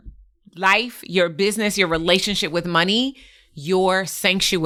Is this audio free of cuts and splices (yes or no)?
yes